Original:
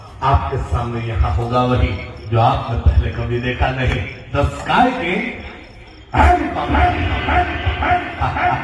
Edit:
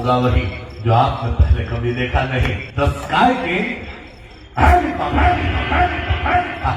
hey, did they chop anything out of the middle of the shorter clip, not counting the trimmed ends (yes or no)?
yes